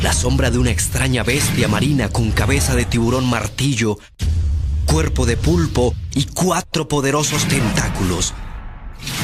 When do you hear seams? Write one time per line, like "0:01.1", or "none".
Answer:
0:03.5